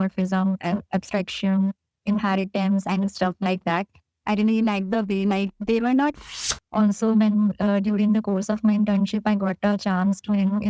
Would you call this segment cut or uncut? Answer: cut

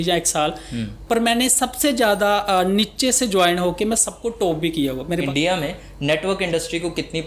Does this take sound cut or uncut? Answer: cut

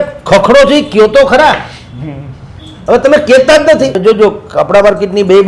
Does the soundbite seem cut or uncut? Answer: cut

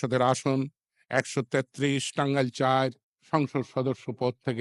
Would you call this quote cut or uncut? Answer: cut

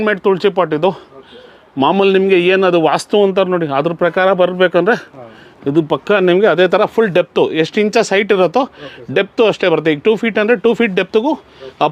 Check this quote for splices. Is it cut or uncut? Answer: uncut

